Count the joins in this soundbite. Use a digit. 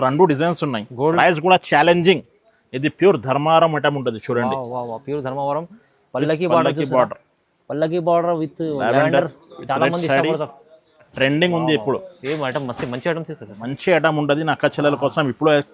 2